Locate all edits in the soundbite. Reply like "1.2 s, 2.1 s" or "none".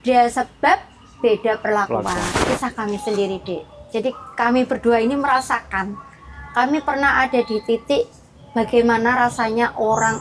2.3 s